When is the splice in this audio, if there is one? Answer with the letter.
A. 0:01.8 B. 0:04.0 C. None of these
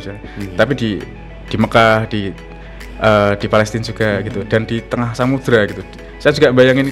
C